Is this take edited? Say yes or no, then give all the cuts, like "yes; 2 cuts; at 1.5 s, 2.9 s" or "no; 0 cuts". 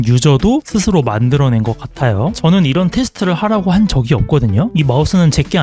yes; 1 cut; at 4.7 s